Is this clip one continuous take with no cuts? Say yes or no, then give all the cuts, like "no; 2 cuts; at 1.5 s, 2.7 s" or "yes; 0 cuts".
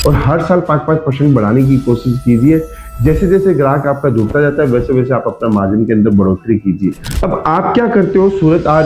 no; 1 cut; at 7.1 s